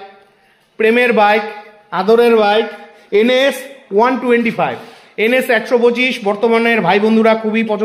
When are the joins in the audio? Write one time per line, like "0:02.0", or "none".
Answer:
none